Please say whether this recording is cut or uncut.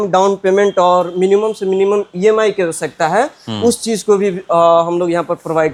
uncut